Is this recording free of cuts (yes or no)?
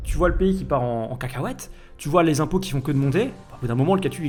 yes